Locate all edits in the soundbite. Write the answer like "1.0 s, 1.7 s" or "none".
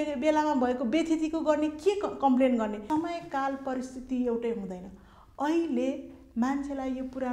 2.8 s